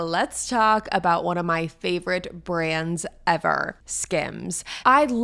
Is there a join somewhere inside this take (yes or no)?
yes